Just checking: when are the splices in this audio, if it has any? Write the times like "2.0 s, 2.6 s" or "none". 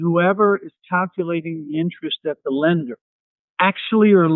none